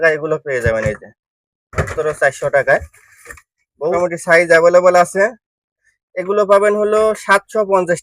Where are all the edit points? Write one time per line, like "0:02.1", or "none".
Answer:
0:03.9